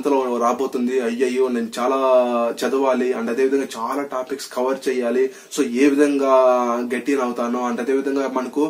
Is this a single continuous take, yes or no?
yes